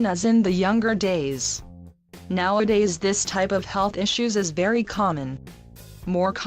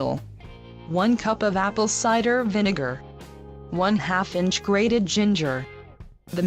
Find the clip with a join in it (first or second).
first